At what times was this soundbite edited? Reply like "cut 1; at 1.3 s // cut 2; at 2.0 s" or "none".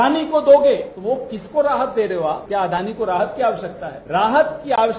cut 1; at 0.9 s // cut 2; at 2.4 s // cut 3; at 3.9 s